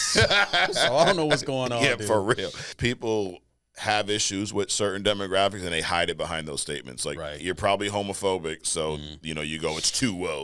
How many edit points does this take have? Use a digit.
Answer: 1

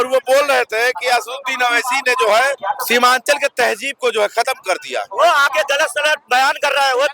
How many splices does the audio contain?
1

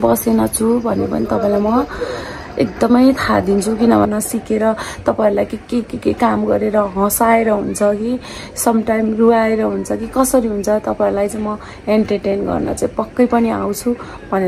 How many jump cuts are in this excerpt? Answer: 1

